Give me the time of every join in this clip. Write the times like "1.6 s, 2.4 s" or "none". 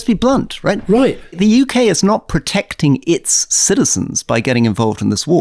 none